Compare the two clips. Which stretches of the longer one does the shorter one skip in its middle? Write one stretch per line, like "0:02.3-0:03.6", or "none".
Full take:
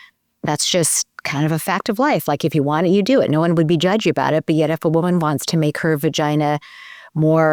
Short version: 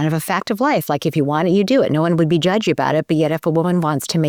none

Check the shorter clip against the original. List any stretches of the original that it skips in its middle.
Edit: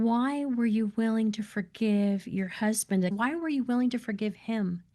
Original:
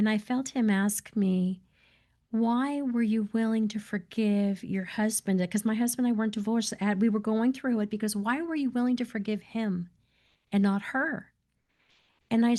0:05.5-0:08.2

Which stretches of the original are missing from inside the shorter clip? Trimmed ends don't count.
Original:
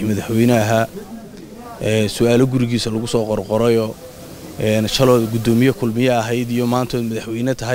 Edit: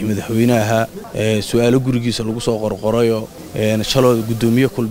0:01.0-0:01.7
0:04.0-0:04.4

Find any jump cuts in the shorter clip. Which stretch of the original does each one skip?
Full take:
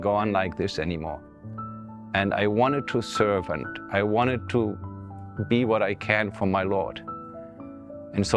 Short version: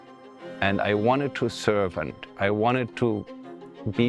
none

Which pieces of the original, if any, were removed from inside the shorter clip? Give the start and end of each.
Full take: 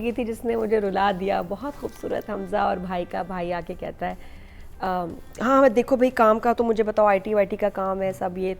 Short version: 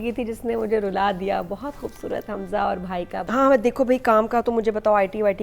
0:03.2-0:05.4

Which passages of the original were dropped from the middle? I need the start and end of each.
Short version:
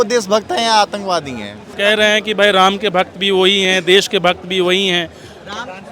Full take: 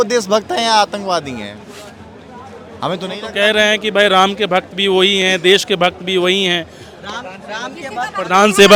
0:01.6-0:03.2

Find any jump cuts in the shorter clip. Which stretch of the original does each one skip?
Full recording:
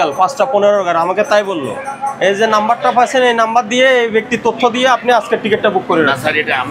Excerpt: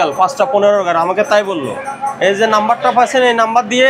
none

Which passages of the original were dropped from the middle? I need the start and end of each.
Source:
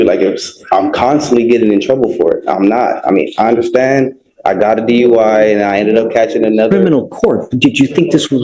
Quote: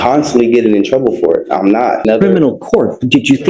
0:03.0-0:06.5

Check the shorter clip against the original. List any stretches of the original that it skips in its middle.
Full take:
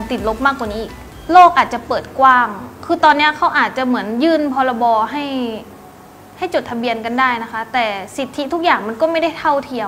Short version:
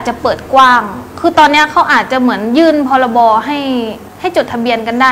0:05.7-0:06.2

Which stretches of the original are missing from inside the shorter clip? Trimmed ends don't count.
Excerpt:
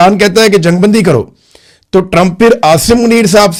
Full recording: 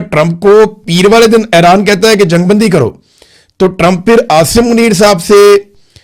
none

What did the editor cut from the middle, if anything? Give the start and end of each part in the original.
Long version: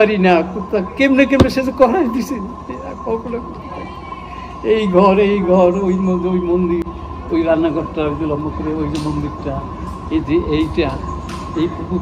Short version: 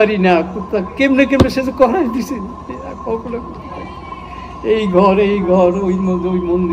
none

